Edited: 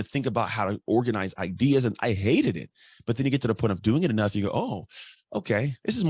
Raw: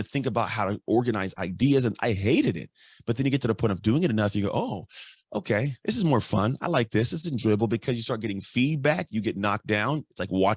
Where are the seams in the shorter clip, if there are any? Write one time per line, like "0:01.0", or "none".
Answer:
none